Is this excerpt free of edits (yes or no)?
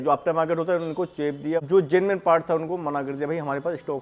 no